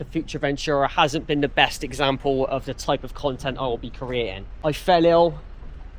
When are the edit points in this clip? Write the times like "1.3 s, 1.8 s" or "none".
4.5 s